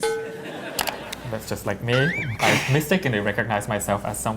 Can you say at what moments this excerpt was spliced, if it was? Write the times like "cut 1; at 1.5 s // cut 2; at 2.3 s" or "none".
cut 1; at 1.1 s